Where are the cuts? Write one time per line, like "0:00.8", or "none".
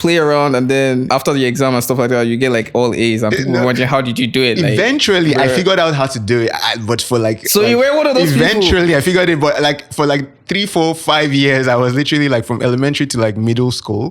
0:01.1

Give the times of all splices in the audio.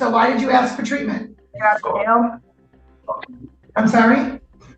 0:01.5

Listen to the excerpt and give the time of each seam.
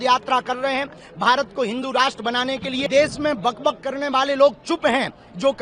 0:02.8

